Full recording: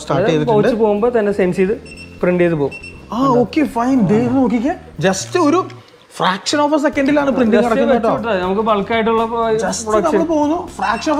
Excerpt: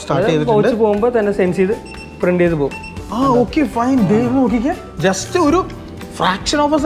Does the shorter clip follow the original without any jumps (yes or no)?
yes